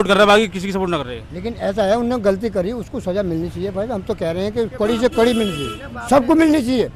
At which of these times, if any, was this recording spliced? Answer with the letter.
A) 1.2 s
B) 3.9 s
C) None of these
C